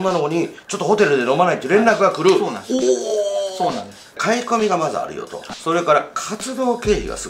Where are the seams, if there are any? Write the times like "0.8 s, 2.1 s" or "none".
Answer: 4.1 s, 5.5 s